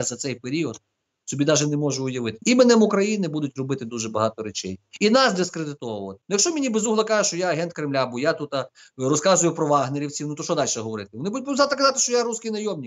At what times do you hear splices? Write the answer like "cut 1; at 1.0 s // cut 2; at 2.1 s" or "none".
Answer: cut 1; at 2.4 s // cut 2; at 6.1 s